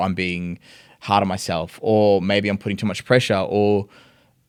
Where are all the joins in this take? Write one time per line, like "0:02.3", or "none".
none